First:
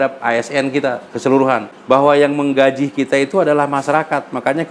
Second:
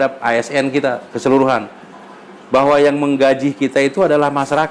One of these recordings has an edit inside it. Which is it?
first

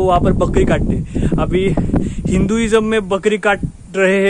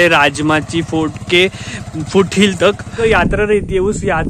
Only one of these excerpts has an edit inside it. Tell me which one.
second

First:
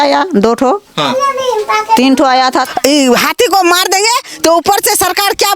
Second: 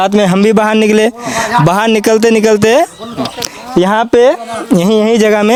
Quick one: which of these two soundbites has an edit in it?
first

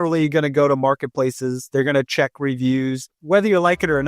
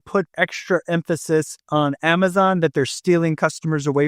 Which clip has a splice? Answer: first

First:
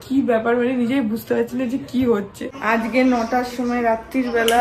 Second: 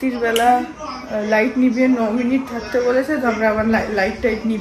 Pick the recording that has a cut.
first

